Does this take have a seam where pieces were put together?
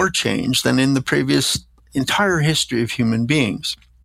no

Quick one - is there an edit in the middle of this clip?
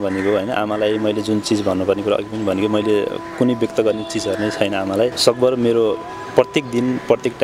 yes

